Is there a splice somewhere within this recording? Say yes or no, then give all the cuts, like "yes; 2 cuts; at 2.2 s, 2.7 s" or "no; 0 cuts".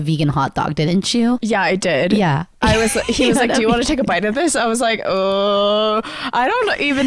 yes; 1 cut; at 1.4 s